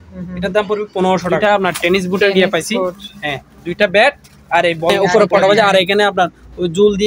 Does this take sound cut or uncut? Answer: cut